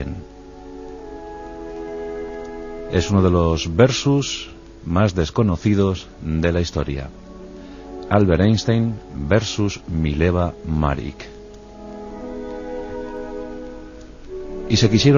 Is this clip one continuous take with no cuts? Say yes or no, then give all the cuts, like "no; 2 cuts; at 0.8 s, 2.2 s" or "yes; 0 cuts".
yes; 0 cuts